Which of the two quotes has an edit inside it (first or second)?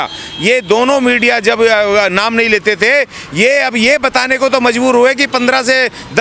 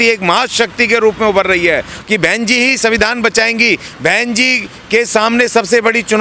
second